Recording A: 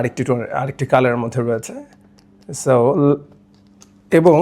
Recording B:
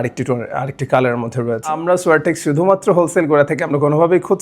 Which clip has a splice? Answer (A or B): B